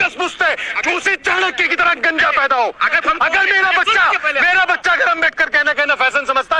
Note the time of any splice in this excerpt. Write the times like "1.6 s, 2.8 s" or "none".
2.9 s